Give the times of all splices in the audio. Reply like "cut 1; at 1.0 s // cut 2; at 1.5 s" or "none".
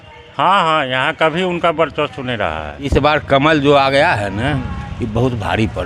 cut 1; at 2.9 s